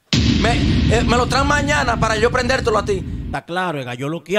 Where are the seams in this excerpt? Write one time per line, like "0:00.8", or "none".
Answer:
0:03.2